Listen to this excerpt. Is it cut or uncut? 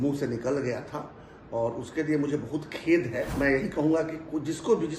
cut